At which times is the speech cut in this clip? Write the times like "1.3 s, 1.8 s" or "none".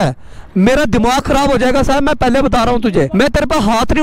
3.1 s